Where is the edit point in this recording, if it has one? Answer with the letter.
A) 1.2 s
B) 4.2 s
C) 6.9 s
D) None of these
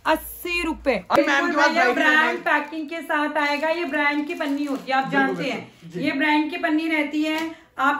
A